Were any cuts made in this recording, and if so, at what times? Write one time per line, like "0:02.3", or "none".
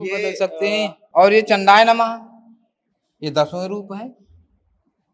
0:01.0